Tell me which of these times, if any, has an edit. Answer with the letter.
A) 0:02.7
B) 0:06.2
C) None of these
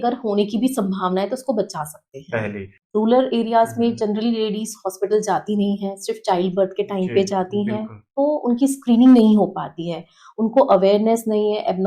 A